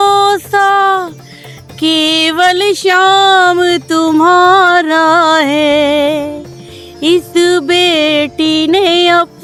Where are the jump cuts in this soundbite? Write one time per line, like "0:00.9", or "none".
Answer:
none